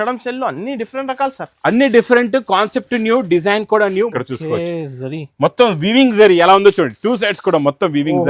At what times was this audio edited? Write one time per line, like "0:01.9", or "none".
0:04.1